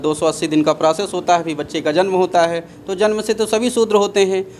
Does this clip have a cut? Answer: no; 0 cuts

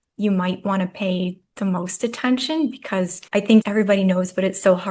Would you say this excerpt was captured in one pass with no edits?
no; 2 cuts; at 1.4 s, 3.5 s

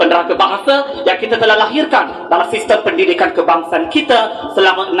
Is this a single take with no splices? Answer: yes; 0 cuts

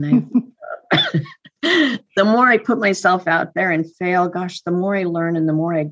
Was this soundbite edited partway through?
no; 0 cuts

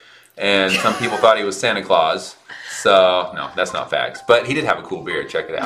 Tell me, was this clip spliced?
no; 0 cuts

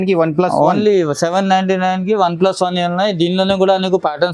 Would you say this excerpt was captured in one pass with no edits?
yes; 0 cuts

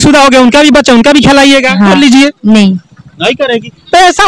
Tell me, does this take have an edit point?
no; 0 cuts

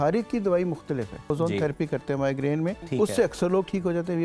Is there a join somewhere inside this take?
yes; 2 cuts; at 1.3 s, 2.8 s

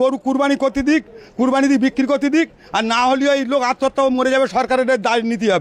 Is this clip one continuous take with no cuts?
yes; 0 cuts

